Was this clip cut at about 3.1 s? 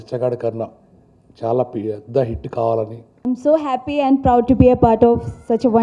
yes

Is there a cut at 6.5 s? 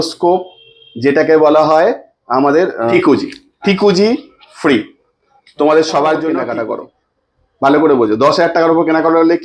yes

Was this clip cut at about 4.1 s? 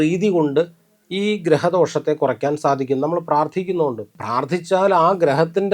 yes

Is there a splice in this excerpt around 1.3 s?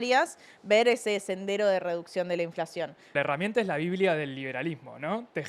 no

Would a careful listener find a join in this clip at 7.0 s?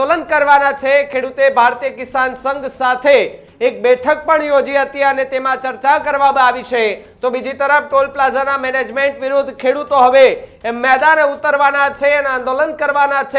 no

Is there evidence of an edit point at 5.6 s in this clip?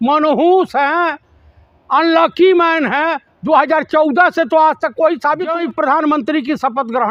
yes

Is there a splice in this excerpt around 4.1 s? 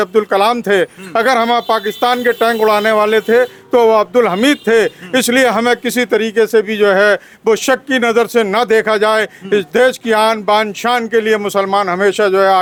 no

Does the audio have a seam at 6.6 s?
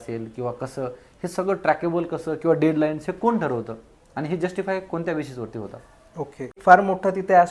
yes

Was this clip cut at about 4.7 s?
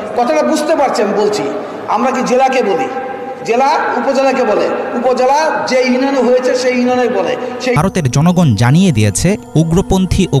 no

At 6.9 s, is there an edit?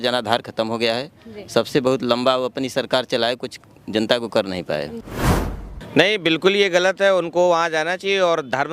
no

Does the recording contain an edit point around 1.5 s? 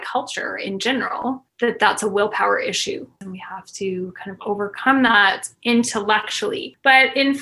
no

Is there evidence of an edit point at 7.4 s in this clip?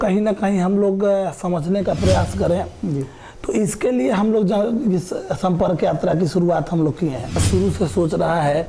yes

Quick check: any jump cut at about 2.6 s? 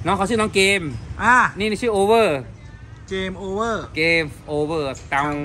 no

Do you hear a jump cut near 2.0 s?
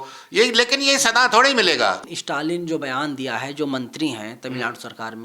yes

